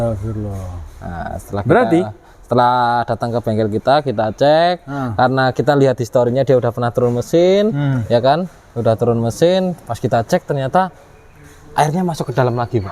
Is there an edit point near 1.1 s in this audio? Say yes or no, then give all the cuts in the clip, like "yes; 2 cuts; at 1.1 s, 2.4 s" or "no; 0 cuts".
no; 0 cuts